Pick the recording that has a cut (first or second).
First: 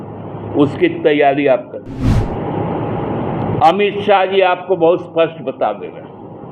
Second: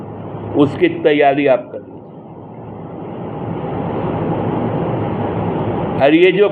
first